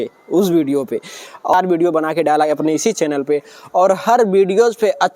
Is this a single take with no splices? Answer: no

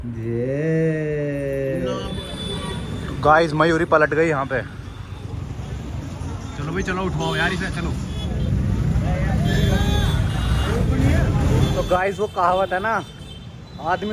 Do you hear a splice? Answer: yes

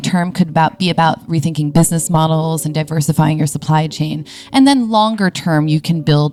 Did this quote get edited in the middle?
no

